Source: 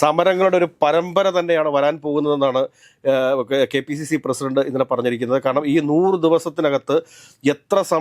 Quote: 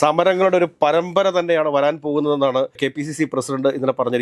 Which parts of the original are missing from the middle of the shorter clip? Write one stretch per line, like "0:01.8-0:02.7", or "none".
0:02.8-0:03.7